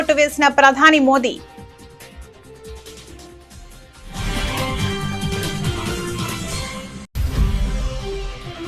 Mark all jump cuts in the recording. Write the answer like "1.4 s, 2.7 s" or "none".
none